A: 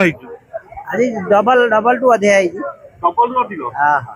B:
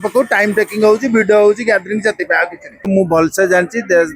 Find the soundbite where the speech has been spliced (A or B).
B